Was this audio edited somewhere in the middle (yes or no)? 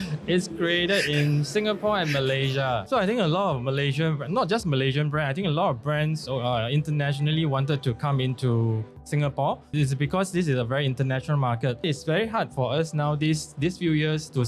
yes